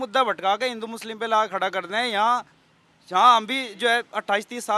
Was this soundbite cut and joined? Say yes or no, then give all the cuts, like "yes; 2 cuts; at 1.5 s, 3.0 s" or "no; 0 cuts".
no; 0 cuts